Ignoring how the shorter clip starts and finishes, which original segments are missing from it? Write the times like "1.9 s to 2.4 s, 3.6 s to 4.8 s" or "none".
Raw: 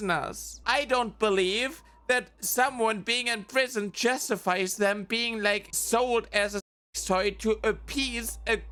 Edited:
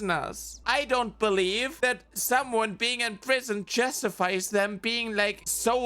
1.7 s to 2.0 s